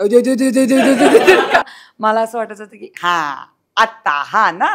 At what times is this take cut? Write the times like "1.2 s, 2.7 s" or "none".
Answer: 1.6 s